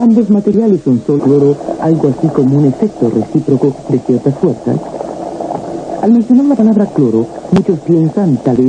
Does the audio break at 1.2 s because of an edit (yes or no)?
no